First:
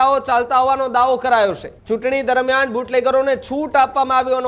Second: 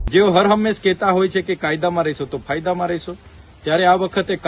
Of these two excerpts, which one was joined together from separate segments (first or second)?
first